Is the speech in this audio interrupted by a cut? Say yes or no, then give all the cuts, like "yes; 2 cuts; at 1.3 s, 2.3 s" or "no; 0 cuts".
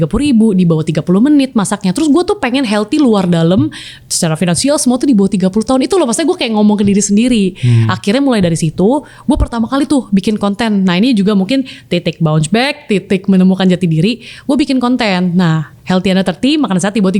no; 0 cuts